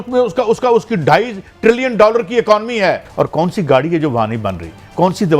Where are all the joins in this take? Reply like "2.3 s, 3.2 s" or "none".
3.1 s